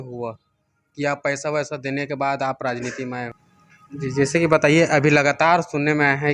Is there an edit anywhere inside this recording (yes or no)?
yes